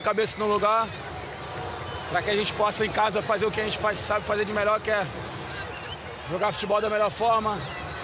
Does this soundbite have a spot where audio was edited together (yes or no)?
no